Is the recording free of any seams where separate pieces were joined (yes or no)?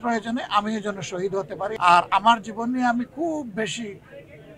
no